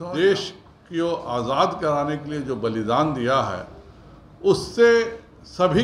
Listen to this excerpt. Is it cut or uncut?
uncut